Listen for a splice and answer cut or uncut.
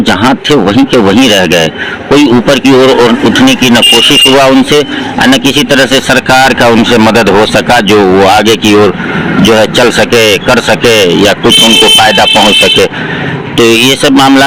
uncut